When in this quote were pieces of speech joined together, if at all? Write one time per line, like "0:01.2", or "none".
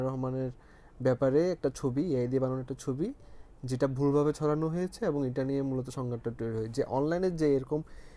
none